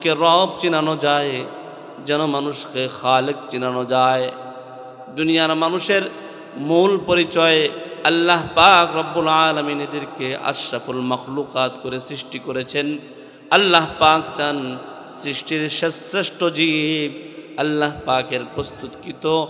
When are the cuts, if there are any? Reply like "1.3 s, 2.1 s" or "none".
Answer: none